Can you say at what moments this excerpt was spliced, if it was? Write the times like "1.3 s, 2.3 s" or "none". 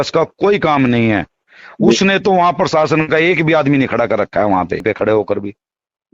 4.8 s